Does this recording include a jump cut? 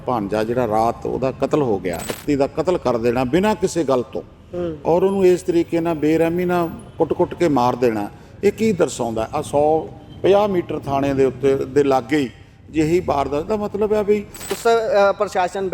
yes; 2 cuts; at 2.1 s, 14.5 s

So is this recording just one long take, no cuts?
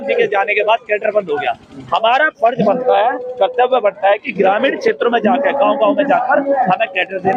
yes; 0 cuts

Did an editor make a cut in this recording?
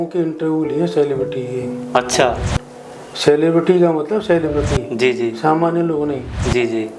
no; 0 cuts

